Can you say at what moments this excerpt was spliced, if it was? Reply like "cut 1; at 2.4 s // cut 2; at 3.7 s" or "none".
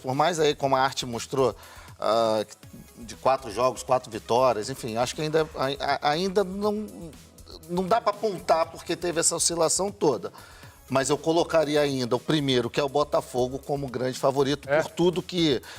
none